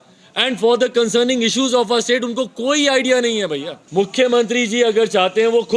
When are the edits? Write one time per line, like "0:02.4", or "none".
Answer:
0:03.8